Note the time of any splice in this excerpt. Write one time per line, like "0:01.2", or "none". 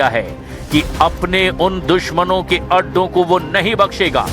0:02.1